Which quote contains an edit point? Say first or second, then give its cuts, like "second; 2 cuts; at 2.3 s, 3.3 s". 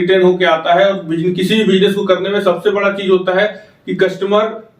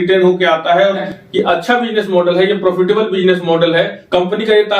second; 2 cuts; at 1.1 s, 4.0 s